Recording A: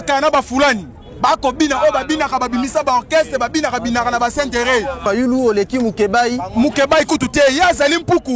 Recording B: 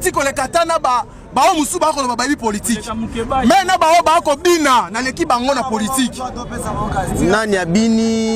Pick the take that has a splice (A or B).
A